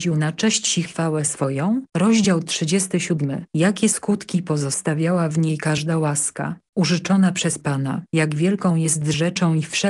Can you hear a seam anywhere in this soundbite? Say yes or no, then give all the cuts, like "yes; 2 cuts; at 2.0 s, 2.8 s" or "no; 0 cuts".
yes; 1 cut; at 1.9 s